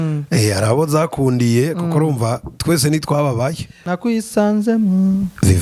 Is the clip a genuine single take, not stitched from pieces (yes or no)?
no